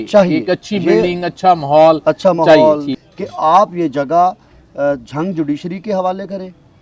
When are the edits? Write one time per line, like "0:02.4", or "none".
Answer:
0:02.9